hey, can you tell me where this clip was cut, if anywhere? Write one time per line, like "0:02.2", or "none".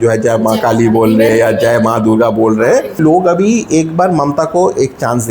0:03.0